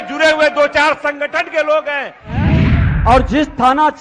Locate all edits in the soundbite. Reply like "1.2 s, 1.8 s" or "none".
2.5 s